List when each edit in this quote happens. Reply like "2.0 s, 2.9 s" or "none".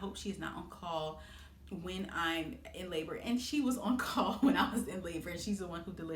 none